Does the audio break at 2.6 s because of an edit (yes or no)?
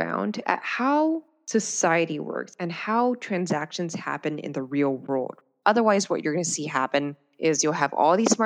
no